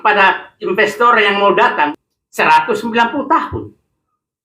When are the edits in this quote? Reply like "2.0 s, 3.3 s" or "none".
1.9 s